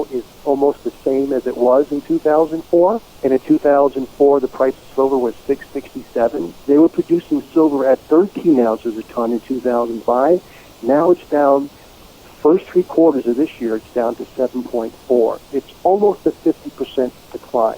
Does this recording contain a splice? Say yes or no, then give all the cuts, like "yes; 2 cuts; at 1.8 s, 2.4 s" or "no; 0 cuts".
yes; 2 cuts; at 3.1 s, 6.5 s